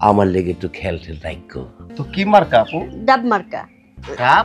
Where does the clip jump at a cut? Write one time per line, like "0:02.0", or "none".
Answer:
0:01.7

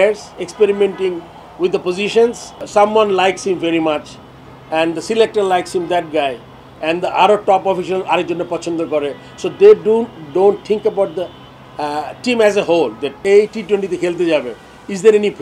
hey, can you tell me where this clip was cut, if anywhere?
0:02.5
0:13.2

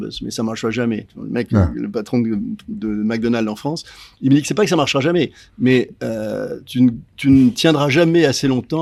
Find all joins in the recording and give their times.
none

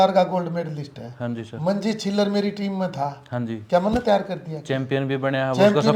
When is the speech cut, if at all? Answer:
none

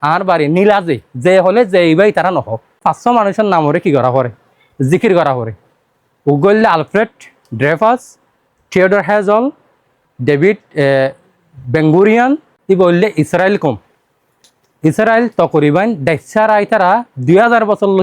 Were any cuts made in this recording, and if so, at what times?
0:02.8
0:12.5

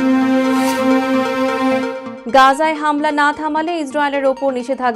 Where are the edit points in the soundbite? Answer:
0:02.1

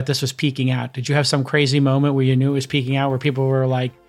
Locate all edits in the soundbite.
none

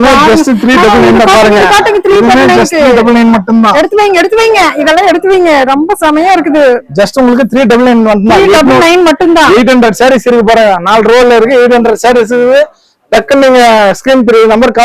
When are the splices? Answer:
none

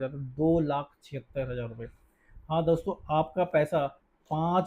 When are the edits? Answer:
none

